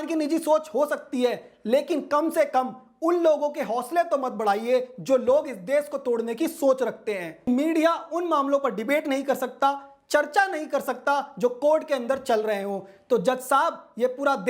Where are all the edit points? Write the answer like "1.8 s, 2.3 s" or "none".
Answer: 7.5 s